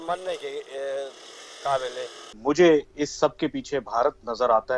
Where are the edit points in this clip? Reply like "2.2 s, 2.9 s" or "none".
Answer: 2.3 s